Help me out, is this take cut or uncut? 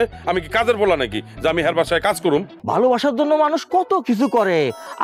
cut